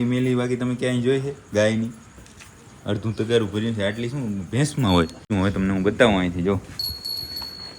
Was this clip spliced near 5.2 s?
yes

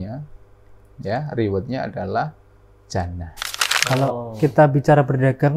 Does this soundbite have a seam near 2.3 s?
no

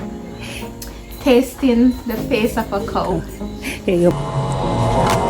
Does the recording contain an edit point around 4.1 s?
yes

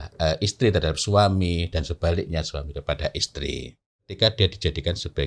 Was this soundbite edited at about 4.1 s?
yes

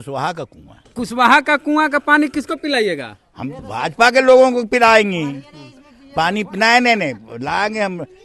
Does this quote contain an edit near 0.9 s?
yes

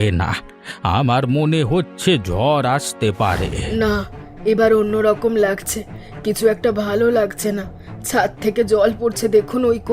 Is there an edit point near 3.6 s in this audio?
yes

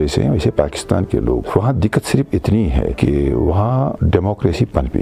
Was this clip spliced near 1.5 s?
yes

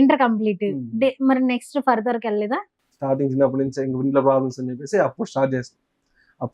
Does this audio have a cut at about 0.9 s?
no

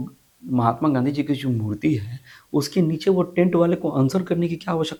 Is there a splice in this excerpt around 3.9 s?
no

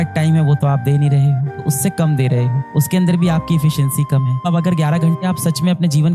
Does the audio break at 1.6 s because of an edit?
yes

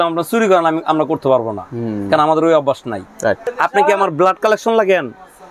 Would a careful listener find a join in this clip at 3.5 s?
yes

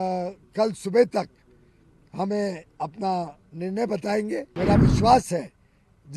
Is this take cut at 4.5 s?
yes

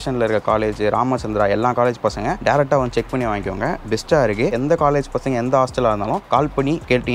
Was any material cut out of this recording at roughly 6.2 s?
yes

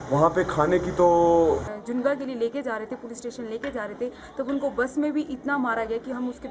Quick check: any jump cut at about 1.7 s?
yes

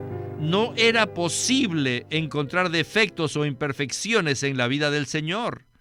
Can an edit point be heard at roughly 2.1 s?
no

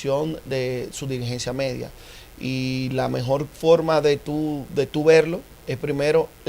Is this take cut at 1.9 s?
no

